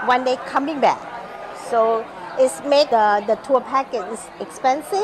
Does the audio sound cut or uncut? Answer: cut